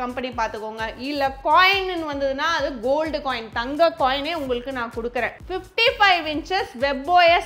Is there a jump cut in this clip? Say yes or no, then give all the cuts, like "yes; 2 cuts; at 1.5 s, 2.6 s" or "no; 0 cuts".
yes; 1 cut; at 5.3 s